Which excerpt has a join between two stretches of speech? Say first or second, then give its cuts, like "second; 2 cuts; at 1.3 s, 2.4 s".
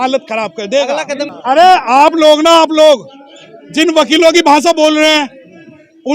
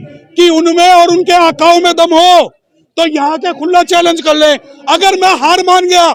first; 1 cut; at 1.3 s